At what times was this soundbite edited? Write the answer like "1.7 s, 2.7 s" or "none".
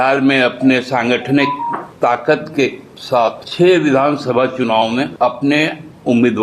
1.9 s, 3.4 s, 5.1 s

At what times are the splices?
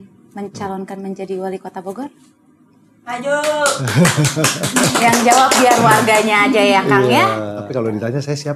7.6 s

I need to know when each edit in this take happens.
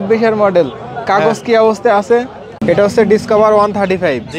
2.4 s

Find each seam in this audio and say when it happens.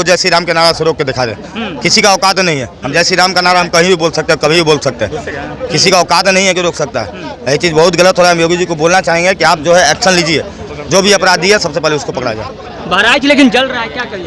none

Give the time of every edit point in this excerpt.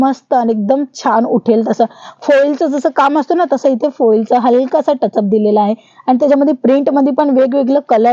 none

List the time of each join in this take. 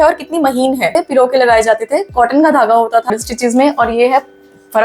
0.9 s, 3.1 s

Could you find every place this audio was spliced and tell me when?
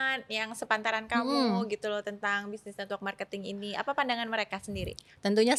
none

